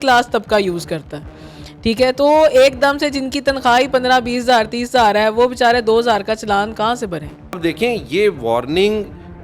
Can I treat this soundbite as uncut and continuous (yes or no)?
no